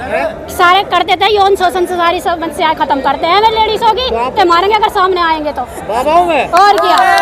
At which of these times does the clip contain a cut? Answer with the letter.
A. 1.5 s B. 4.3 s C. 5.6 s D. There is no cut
B